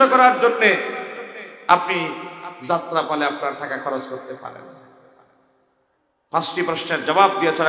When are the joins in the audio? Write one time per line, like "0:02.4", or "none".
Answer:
none